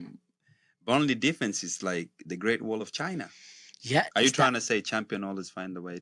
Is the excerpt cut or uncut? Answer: cut